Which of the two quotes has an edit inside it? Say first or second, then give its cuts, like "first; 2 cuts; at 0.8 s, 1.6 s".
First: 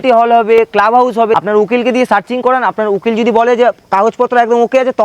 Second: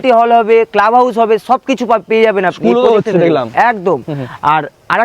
first; 1 cut; at 1.3 s